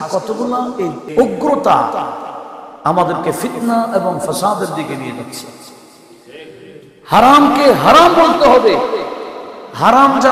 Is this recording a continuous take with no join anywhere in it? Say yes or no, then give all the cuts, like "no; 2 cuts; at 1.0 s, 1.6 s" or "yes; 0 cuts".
no; 1 cut; at 1.1 s